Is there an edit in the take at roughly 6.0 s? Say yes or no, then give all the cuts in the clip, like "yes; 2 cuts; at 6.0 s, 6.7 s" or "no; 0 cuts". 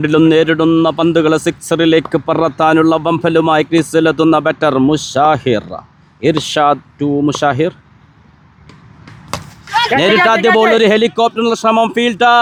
no; 0 cuts